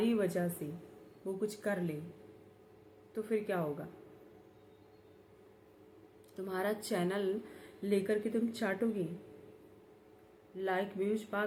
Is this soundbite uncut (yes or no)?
yes